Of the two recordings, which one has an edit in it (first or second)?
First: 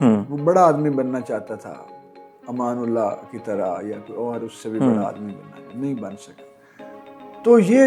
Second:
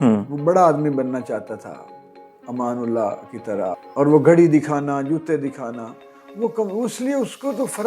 second